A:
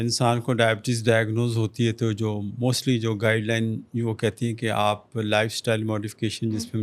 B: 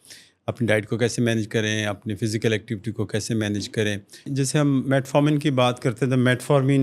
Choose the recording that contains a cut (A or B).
B